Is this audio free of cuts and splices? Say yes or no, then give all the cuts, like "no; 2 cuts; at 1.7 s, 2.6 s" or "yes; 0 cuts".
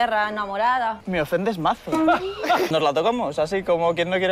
no; 2 cuts; at 1.0 s, 2.7 s